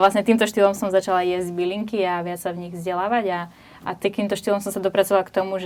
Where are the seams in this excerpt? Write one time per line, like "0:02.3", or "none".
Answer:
none